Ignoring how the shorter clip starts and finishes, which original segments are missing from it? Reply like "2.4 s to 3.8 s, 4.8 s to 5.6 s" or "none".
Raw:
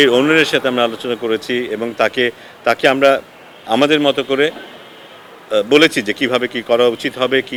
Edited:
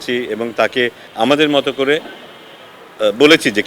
2.4 s to 3.5 s

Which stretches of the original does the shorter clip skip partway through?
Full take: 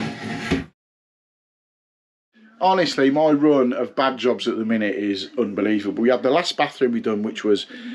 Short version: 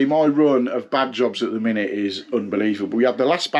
none

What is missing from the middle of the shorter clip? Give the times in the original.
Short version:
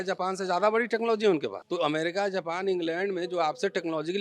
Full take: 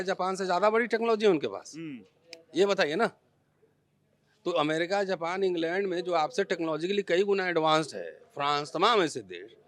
1.6 s to 4.3 s

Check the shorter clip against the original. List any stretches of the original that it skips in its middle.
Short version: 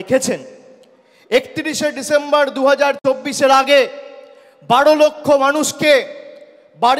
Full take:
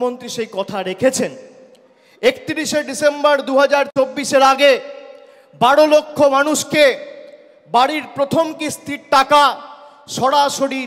none

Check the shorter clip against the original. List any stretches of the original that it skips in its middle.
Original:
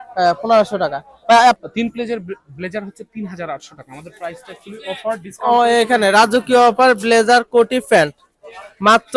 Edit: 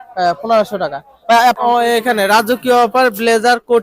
1.6 s to 5.4 s

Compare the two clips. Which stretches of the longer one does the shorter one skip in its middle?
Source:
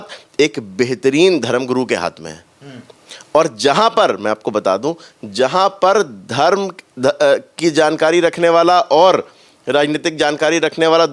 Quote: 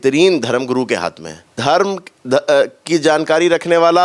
2.5 s to 6.2 s

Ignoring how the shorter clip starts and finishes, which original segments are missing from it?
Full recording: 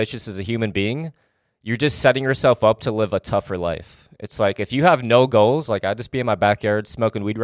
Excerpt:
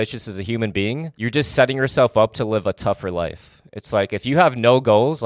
1.1 s to 1.6 s

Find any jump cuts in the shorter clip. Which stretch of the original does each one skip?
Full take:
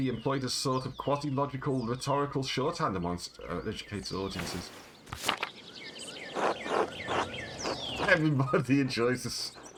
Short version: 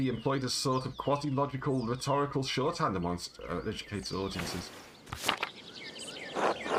none

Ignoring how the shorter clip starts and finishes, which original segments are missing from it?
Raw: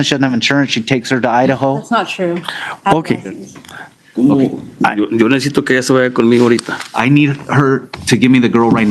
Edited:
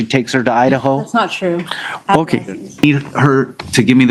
3.6 s to 7.2 s

